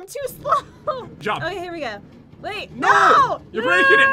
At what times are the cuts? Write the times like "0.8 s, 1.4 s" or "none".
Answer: 1.2 s